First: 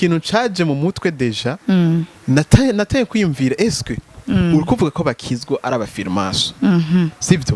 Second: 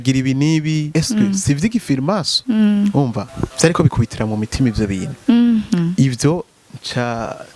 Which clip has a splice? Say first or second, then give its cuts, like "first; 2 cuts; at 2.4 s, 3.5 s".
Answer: second; 3 cuts; at 0.8 s, 2.3 s, 3.9 s